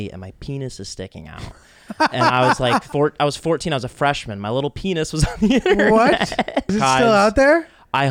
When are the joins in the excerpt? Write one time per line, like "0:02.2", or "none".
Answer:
0:02.9
0:06.7